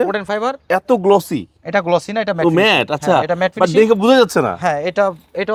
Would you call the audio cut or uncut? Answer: uncut